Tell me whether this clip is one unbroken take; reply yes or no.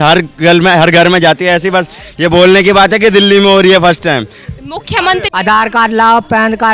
no